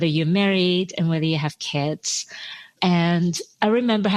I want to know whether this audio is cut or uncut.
uncut